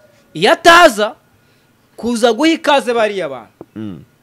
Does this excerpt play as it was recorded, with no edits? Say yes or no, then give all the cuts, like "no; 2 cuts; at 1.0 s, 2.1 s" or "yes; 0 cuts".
yes; 0 cuts